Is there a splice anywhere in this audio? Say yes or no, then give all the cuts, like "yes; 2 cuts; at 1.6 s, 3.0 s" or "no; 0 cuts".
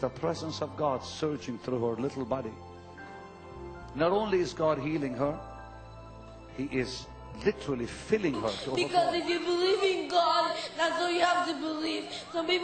yes; 1 cut; at 8.6 s